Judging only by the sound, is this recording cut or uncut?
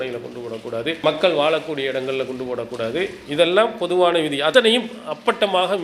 cut